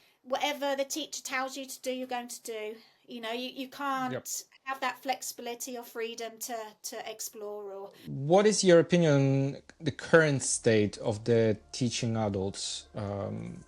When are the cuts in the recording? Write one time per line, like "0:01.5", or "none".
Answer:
0:08.0